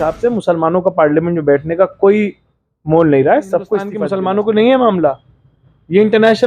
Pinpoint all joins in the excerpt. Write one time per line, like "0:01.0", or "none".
0:04.0